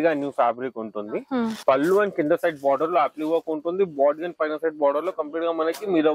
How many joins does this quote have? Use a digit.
1